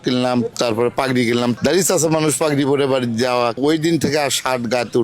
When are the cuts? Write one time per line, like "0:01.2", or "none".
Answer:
0:01.5
0:03.6